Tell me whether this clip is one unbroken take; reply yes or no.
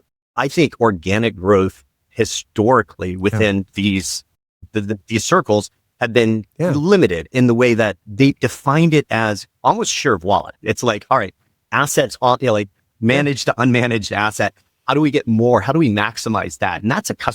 yes